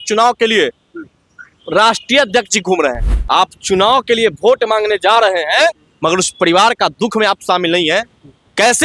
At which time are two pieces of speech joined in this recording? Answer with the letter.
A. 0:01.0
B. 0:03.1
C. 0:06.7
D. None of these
B